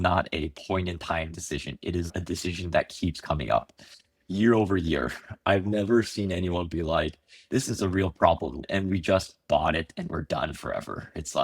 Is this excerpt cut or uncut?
cut